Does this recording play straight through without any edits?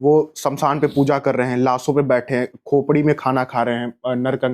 yes; 0 cuts

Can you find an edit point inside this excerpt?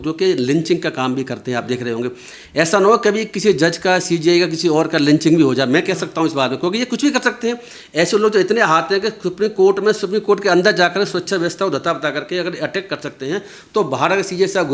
no; 0 cuts

